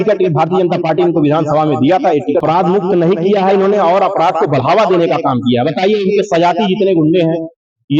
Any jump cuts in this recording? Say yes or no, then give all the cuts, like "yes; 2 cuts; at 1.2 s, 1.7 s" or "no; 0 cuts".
yes; 1 cut; at 2.4 s